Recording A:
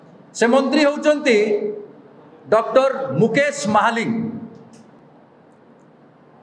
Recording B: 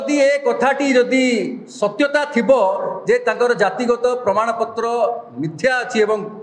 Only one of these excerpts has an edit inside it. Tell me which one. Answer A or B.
A